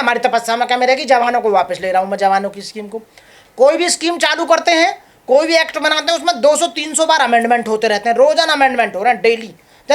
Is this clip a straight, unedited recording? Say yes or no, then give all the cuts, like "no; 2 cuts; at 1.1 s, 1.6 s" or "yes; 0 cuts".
yes; 0 cuts